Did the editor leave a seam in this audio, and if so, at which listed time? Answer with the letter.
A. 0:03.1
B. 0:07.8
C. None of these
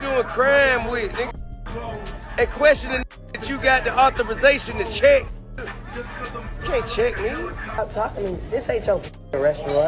B